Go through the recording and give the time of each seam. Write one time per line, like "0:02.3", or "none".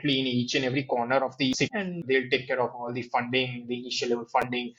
0:02.0